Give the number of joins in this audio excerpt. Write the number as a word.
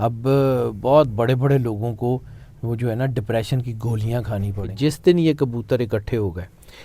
one